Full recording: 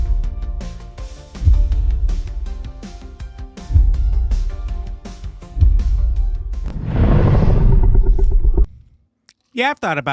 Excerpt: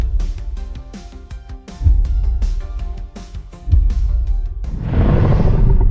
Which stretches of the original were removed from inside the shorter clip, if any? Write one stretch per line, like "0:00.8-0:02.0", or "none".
0:06.6-0:06.7